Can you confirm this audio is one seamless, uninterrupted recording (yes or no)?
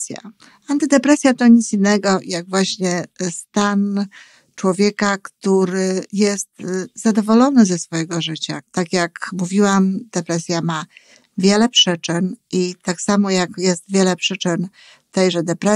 no